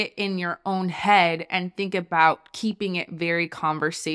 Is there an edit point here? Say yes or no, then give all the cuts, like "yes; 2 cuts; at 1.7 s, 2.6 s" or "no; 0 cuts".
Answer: no; 0 cuts